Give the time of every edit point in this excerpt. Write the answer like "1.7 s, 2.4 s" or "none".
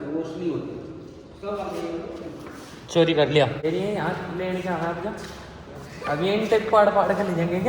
3.6 s